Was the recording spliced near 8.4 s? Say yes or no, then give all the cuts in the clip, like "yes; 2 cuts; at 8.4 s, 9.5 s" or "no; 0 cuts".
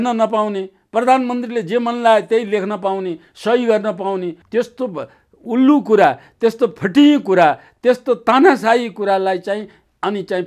no; 1 cut; at 4.4 s